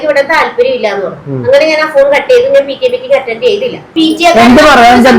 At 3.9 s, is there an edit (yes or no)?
yes